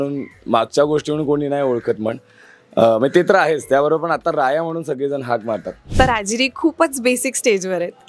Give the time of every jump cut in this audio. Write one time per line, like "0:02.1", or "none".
0:05.9